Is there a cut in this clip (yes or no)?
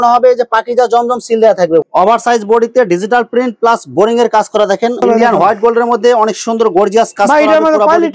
yes